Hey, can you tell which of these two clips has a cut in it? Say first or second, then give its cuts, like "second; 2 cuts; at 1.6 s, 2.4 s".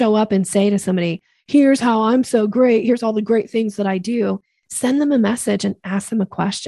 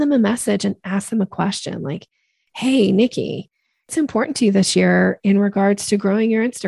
second; 1 cut; at 3.9 s